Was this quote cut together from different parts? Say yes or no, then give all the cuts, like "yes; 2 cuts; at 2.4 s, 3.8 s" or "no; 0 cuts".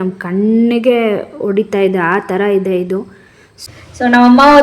yes; 1 cut; at 3.5 s